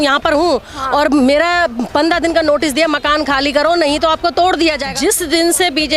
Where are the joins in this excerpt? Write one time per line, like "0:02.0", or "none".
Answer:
0:04.9